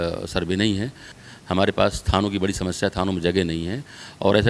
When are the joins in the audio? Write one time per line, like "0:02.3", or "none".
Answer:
0:01.1